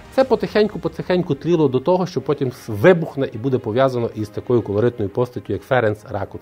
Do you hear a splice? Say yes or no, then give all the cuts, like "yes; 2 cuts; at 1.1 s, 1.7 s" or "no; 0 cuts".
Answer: no; 0 cuts